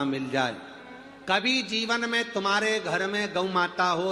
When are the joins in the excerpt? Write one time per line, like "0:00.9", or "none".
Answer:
0:01.9